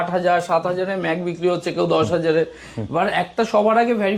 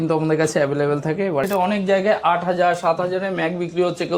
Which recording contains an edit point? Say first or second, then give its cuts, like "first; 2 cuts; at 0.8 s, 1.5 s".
second; 1 cut; at 1.4 s